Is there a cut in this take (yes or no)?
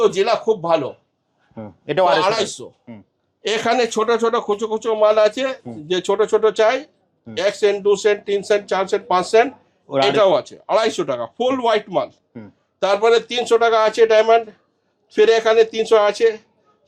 no